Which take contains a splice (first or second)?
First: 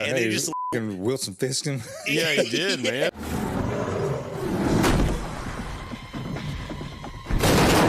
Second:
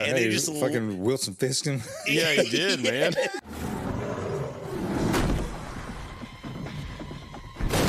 first